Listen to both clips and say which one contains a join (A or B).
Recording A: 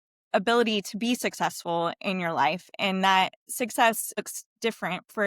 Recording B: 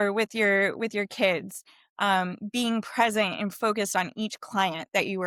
A